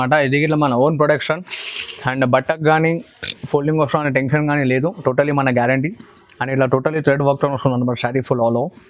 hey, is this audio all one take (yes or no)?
yes